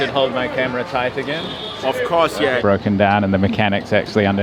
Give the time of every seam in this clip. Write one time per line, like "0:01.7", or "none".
0:02.6